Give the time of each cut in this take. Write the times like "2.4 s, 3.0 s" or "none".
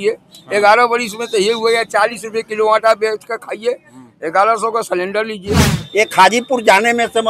5.7 s